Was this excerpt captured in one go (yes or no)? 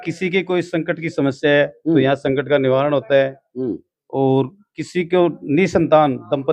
yes